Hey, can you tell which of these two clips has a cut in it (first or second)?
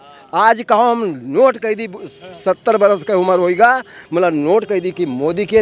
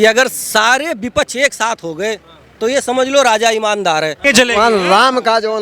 second